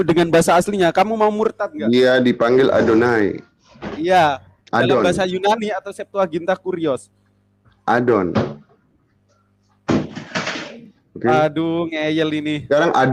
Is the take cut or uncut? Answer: uncut